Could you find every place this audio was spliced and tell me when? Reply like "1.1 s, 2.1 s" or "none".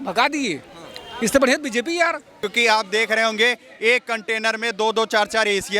2.3 s

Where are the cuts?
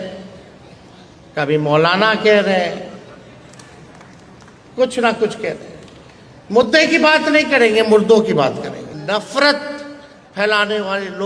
8.9 s

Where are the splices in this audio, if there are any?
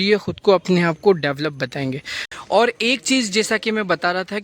2.2 s

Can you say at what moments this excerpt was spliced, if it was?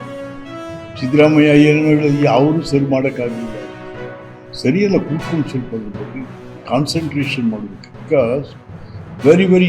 1.0 s

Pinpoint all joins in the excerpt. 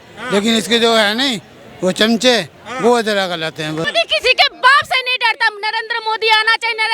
3.9 s

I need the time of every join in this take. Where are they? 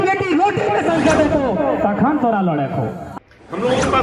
3.0 s

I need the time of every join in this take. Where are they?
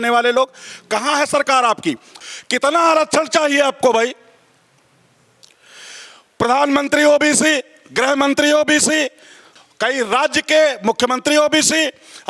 2.1 s

